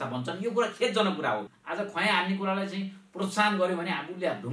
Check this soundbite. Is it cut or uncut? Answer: cut